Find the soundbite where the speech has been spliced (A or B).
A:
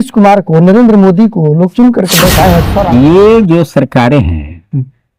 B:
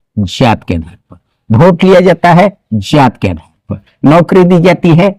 A